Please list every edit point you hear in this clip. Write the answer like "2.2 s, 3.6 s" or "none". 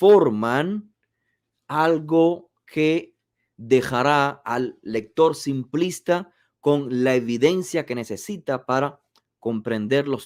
none